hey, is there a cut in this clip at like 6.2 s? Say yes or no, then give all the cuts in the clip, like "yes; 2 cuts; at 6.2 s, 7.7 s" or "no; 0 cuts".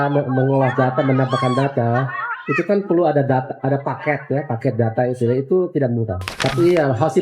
yes; 1 cut; at 6.2 s